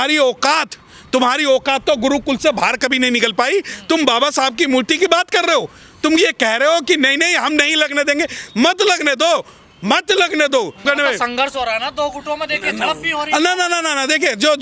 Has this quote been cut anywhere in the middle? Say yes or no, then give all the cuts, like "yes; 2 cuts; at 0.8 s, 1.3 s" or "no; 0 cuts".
no; 0 cuts